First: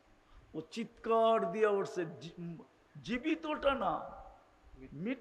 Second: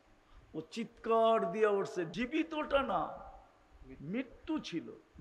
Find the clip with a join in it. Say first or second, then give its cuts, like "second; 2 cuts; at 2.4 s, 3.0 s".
second; 1 cut; at 2.1 s